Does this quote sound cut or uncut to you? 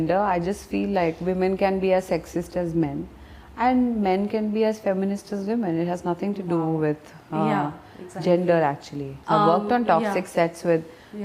cut